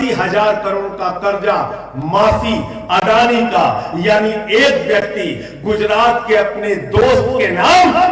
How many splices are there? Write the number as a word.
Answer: zero